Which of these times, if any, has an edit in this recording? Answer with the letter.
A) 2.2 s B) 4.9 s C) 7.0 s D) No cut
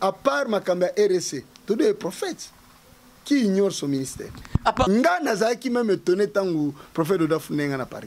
B